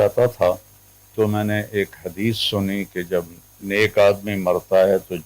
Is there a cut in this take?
yes; 1 cut; at 1.1 s

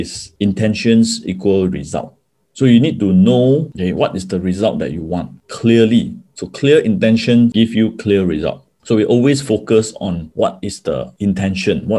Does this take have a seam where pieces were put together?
no; 0 cuts

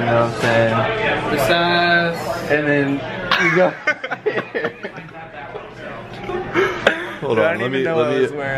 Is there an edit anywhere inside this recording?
no; 0 cuts

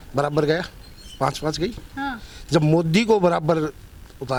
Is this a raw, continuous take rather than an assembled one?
yes; 0 cuts

